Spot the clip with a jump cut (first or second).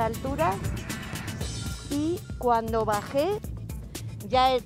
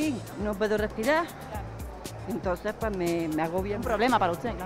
first